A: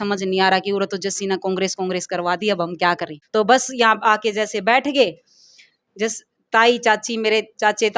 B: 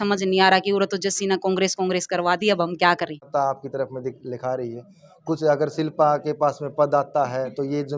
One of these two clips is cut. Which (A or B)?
B